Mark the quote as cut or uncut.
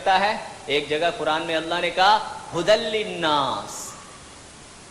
uncut